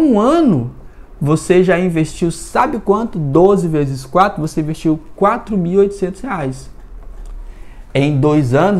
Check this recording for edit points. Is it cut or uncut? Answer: uncut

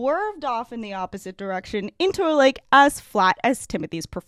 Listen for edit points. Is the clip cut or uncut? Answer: uncut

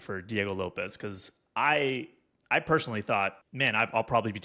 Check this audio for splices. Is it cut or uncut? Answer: cut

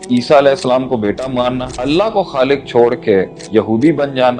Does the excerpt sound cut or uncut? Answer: cut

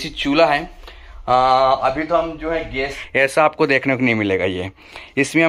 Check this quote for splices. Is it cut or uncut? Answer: cut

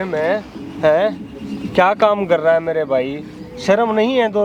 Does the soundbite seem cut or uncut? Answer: uncut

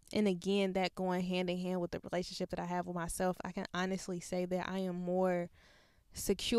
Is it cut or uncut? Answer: uncut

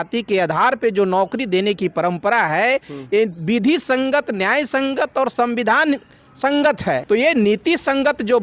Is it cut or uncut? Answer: cut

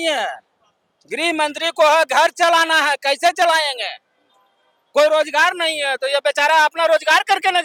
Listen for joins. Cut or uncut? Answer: uncut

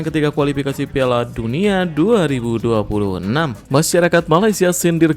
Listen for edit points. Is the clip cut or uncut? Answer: cut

